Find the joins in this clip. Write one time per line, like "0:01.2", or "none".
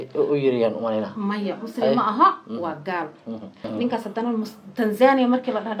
0:03.6